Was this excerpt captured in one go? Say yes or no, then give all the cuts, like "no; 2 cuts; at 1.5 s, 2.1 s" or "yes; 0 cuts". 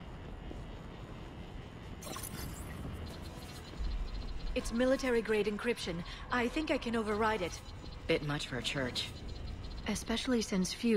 yes; 0 cuts